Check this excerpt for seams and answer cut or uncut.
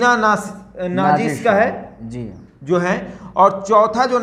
uncut